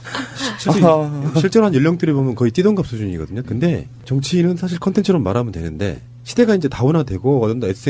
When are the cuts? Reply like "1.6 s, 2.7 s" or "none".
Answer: 2.0 s